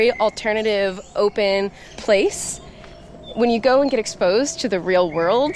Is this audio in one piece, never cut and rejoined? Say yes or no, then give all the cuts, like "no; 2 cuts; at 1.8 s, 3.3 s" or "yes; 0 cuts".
no; 1 cut; at 1.9 s